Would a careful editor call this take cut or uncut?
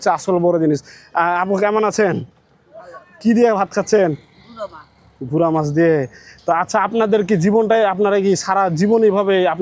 uncut